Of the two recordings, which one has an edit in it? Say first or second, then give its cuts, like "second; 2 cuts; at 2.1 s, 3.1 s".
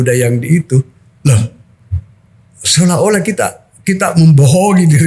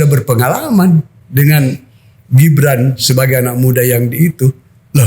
second; 1 cut; at 1.2 s